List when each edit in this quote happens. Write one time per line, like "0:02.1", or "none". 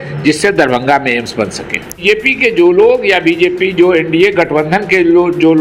0:02.0